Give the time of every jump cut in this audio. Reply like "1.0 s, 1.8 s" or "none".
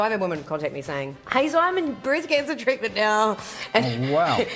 1.2 s